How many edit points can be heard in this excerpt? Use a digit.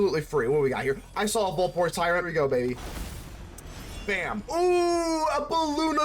2